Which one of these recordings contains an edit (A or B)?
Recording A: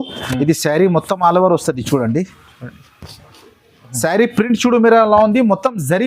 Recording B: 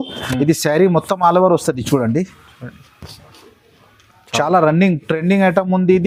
A